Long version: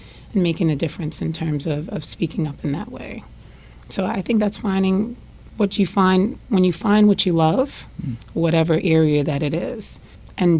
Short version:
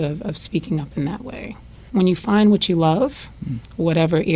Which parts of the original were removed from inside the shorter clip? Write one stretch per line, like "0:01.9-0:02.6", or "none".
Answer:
0:03.5-0:06.4